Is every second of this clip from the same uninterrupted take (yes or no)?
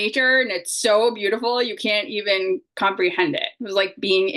yes